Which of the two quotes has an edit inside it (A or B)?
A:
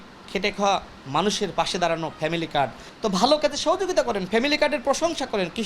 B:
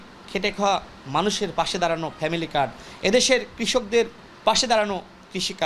A